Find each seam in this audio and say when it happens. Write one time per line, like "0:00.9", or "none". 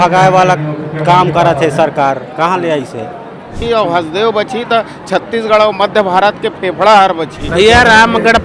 0:03.6
0:07.4